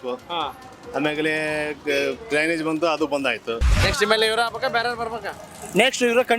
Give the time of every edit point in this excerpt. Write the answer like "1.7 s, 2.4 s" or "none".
3.7 s